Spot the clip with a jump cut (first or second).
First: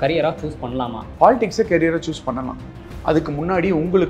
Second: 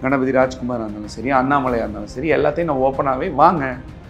first